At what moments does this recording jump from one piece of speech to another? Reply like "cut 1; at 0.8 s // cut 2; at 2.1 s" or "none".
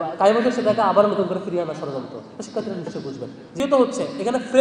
cut 1; at 3.6 s